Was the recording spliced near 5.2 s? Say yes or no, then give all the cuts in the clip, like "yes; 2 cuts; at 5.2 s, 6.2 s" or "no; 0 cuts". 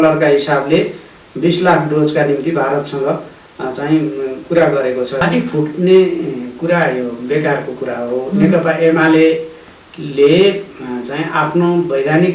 yes; 1 cut; at 5.2 s